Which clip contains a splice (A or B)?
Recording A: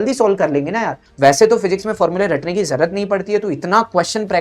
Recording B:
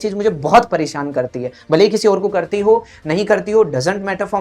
A